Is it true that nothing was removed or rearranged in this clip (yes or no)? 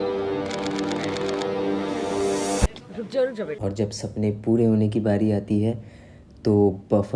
no